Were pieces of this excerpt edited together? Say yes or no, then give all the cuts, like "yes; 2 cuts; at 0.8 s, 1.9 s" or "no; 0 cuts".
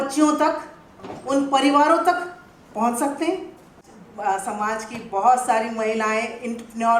yes; 1 cut; at 3.9 s